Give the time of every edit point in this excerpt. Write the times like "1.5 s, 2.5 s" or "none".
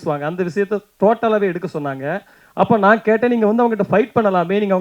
2.4 s